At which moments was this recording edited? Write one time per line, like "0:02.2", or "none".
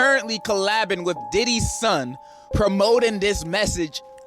0:02.4